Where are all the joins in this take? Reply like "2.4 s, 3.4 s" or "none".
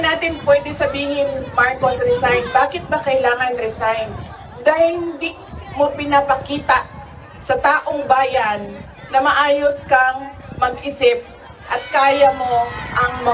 none